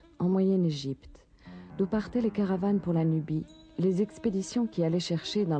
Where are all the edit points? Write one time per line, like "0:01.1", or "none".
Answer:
0:01.7

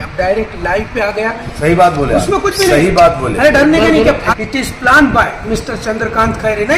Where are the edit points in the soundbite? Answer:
0:01.5
0:04.3

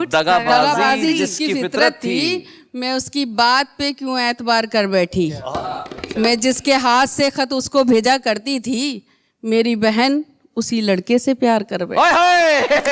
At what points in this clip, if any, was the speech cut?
none

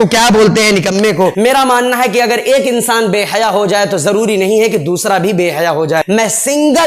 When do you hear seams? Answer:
0:01.3
0:06.0

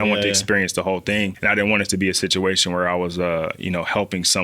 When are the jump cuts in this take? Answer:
0:01.4

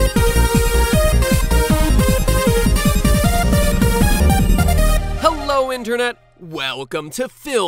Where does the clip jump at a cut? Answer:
0:01.6

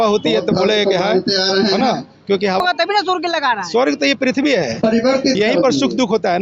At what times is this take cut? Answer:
0:02.6

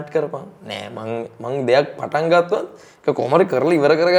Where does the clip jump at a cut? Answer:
none

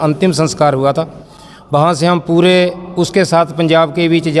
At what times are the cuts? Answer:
none

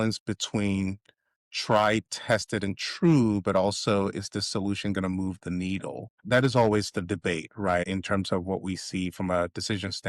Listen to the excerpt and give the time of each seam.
0:06.2
0:07.8

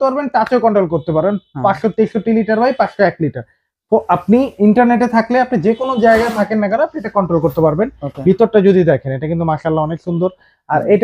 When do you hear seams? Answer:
none

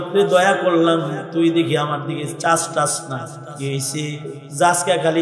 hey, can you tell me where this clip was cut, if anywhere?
0:03.4

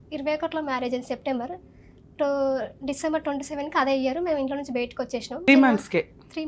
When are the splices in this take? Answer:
0:05.5

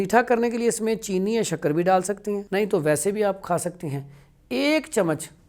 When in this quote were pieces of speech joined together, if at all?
0:02.4

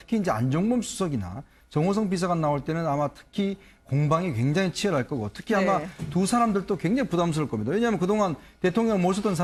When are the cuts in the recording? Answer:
none

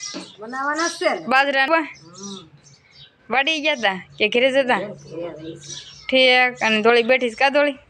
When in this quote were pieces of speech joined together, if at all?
0:01.7

